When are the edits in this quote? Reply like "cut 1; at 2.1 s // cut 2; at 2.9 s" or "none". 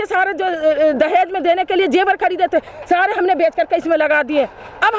none